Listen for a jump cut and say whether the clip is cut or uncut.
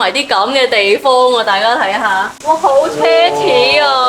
cut